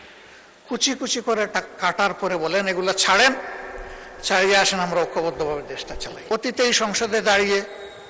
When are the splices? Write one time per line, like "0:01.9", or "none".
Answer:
0:06.3